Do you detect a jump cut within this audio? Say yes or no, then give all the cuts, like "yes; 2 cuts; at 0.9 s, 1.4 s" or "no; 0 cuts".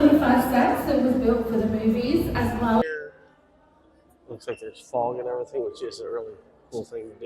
yes; 1 cut; at 2.8 s